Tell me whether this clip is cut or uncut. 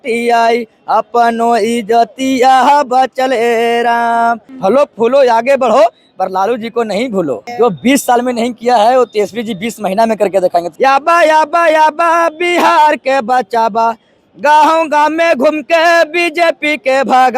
cut